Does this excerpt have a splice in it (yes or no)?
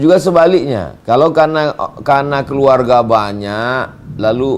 yes